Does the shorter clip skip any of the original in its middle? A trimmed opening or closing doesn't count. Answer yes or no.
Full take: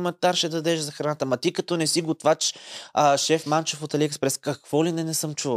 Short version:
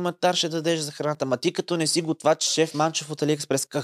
yes